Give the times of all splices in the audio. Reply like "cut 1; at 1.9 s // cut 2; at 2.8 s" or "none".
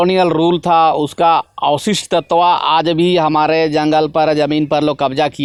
none